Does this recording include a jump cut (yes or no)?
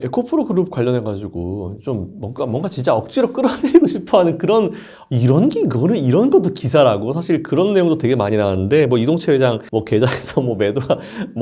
no